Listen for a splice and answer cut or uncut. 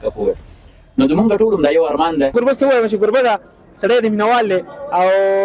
cut